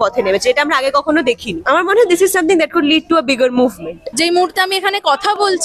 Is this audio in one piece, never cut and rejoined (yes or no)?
no